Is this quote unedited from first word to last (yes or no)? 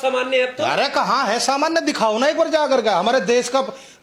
yes